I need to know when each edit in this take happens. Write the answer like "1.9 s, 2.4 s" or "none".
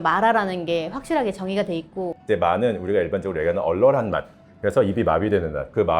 2.2 s